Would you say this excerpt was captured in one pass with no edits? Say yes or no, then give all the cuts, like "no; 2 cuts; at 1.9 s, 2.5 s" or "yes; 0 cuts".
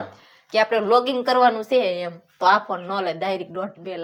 yes; 0 cuts